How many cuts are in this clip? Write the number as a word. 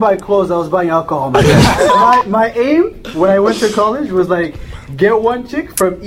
one